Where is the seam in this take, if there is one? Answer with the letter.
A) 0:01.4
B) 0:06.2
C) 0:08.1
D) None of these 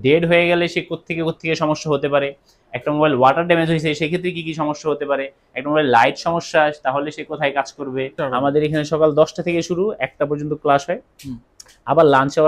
C